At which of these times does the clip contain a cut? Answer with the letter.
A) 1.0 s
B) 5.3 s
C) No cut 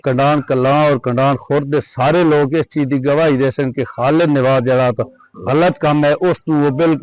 B